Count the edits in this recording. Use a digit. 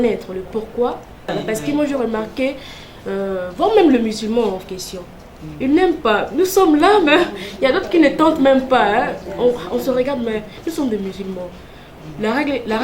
1